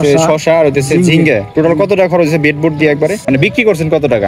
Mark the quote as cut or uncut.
cut